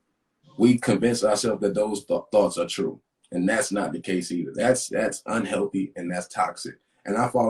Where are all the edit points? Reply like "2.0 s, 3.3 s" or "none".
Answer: none